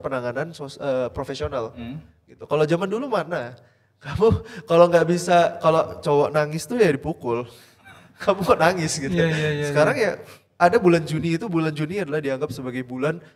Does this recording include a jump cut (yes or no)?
no